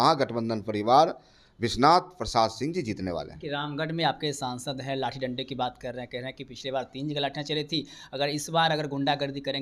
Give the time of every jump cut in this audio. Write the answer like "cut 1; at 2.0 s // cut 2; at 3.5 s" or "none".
none